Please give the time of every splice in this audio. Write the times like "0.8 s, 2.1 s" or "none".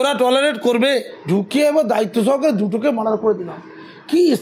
1.1 s